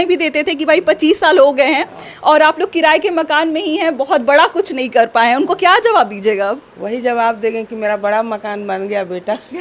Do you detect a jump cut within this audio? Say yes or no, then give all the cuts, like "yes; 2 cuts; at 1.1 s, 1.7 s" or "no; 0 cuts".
no; 0 cuts